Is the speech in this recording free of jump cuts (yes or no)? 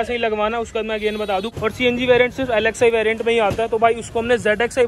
no